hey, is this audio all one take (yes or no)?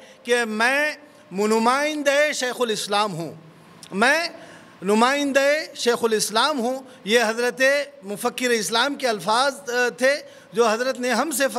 yes